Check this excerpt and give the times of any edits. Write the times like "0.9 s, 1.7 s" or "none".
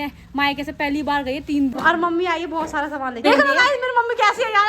1.7 s, 3.2 s